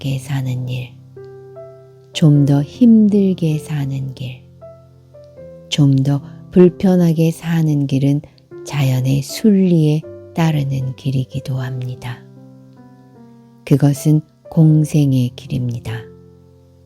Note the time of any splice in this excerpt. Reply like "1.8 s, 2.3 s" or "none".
12.1 s, 13.6 s, 15.8 s

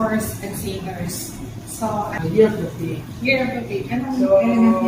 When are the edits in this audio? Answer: 2.2 s

